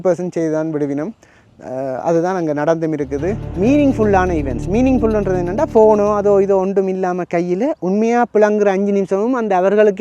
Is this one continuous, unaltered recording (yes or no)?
no